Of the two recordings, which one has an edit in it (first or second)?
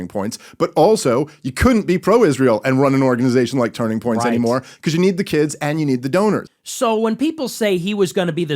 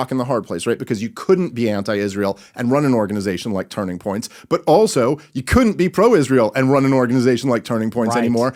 first